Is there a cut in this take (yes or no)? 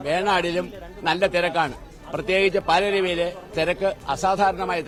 no